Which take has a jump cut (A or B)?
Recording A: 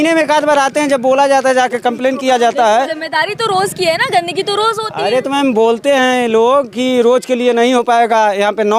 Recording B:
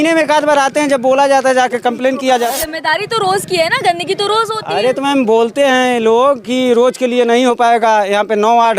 B